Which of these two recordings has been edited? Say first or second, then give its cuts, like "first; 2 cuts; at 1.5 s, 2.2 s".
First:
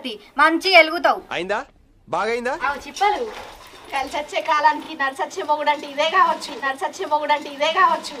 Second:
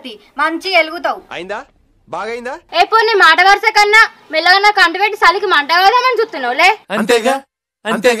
first; 1 cut; at 2.6 s